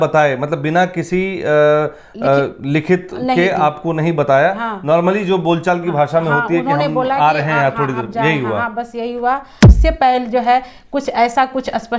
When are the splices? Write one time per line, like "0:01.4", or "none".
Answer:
0:09.7